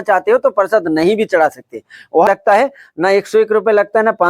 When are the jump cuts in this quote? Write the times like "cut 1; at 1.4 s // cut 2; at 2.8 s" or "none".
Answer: cut 1; at 2.3 s